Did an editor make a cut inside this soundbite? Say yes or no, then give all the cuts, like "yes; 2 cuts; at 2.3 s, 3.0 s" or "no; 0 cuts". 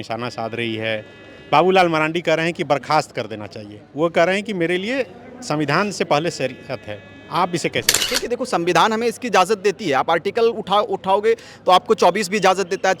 yes; 1 cut; at 8.1 s